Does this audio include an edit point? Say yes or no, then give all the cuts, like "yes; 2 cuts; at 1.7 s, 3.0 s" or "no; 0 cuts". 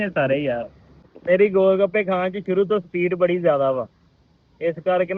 yes; 1 cut; at 1.1 s